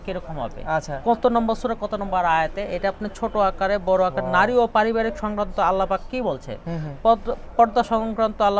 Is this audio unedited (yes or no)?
yes